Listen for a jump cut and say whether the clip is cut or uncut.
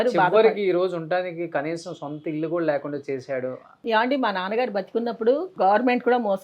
cut